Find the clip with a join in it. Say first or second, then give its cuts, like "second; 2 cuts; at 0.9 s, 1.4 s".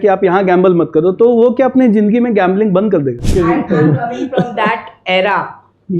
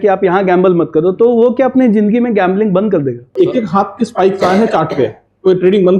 first; 1 cut; at 3.3 s